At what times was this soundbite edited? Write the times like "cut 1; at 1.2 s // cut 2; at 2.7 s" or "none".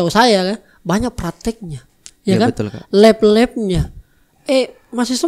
none